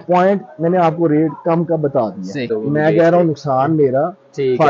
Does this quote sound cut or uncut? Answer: cut